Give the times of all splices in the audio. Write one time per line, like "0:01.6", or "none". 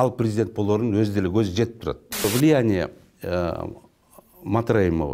0:02.2